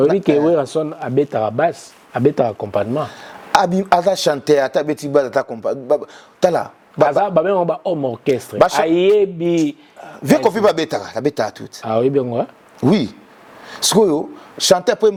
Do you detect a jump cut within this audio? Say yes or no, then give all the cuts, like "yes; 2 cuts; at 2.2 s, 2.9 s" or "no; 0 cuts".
no; 0 cuts